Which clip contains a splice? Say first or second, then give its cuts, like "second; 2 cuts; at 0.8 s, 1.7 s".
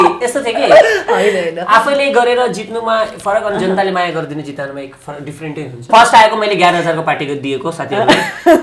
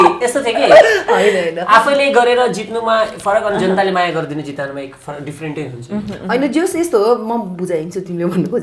first; 1 cut; at 5.9 s